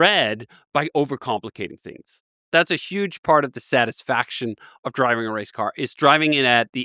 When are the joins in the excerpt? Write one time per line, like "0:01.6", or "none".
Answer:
0:02.4